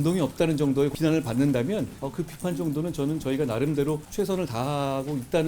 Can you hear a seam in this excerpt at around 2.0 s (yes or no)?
yes